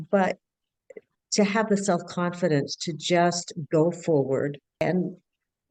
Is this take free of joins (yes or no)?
no